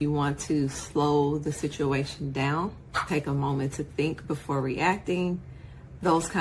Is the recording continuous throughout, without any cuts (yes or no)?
yes